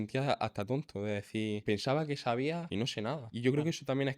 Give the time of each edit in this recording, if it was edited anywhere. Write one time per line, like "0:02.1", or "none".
0:01.6
0:02.9

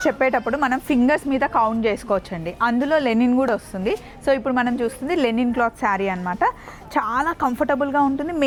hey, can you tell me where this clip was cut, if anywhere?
none

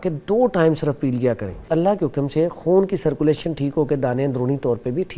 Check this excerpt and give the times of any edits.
0:01.6

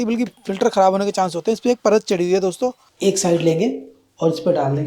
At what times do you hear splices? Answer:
0:02.9

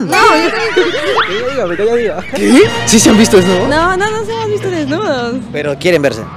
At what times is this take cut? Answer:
0:01.2

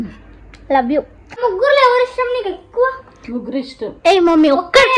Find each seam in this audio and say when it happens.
0:01.4

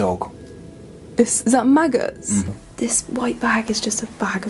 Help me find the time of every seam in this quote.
0:02.5

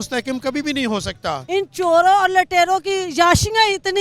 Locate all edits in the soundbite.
0:01.4

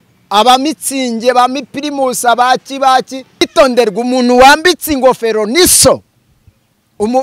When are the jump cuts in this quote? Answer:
0:03.5

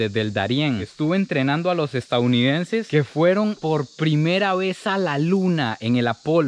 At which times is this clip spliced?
0:00.8
0:02.9

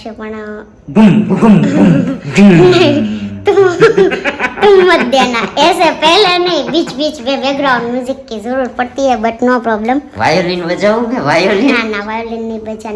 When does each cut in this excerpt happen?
none

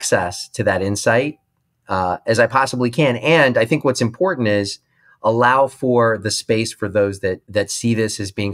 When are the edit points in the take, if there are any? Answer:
0:07.4

